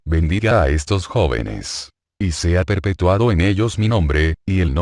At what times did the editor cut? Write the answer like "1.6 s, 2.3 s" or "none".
1.0 s